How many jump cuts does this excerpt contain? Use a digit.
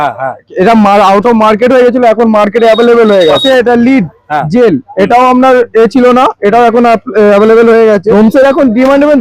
2